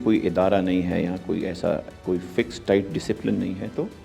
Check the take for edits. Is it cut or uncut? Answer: cut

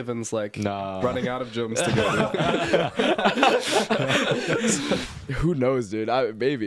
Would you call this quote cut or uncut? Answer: cut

